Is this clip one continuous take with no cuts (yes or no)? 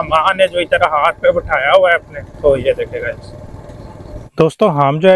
no